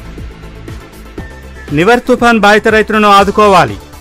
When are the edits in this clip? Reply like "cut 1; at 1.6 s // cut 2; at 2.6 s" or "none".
cut 1; at 1.3 s